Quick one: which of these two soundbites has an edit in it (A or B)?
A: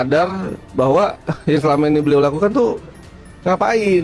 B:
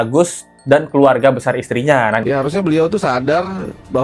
B